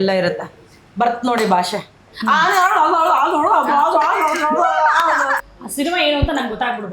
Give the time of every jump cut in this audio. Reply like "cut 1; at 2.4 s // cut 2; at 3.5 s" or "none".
cut 1; at 5.4 s